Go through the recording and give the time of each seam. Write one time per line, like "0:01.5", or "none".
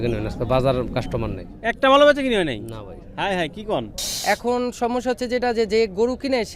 0:04.1